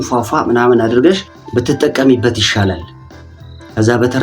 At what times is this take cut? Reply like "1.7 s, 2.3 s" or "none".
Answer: 1.3 s